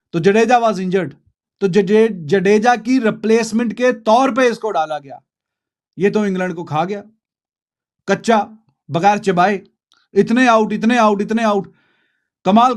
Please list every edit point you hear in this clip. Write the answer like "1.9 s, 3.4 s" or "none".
none